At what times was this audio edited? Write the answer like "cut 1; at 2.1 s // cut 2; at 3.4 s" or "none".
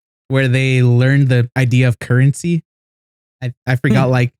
cut 1; at 1.5 s